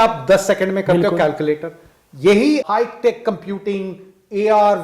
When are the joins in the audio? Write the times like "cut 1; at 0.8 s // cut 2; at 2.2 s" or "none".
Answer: cut 1; at 2.7 s